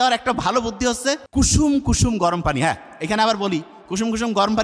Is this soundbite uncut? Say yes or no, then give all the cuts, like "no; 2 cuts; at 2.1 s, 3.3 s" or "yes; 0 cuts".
no; 1 cut; at 1.2 s